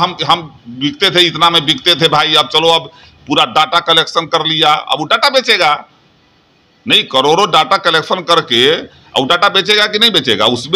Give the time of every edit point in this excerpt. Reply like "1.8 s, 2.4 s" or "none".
none